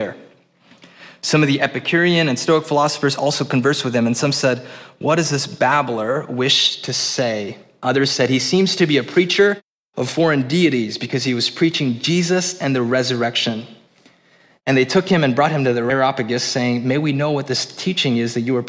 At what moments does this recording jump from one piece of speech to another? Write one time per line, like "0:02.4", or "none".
0:07.8
0:15.9